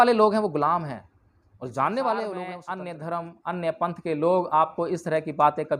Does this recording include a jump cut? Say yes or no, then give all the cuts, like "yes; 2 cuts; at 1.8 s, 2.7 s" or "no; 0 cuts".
yes; 1 cut; at 2.6 s